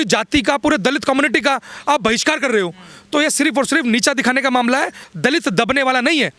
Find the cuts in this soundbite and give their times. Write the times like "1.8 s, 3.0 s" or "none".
5.0 s